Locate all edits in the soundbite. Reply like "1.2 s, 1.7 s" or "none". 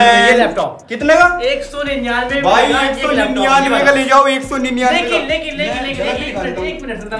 none